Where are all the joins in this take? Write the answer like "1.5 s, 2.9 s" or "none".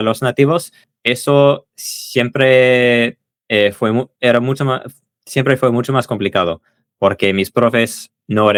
none